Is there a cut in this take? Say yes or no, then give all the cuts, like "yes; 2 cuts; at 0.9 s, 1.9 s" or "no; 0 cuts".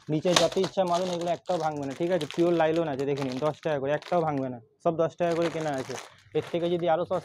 no; 0 cuts